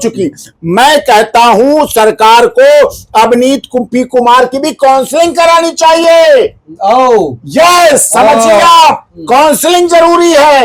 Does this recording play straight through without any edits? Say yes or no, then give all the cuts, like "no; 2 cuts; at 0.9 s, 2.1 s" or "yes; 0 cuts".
yes; 0 cuts